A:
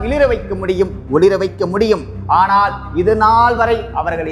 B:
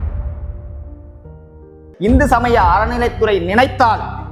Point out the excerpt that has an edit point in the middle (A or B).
B